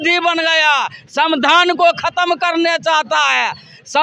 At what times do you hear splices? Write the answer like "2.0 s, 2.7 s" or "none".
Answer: none